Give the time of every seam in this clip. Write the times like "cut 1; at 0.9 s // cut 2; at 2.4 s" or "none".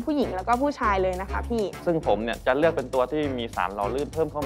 cut 1; at 1.8 s